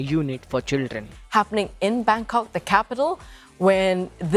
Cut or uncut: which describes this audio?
cut